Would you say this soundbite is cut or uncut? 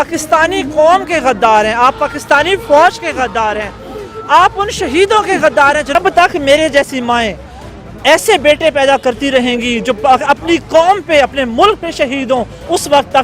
cut